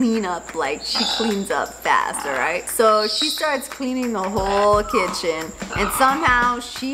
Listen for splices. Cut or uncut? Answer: uncut